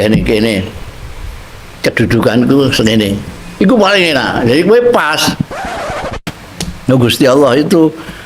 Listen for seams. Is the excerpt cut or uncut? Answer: cut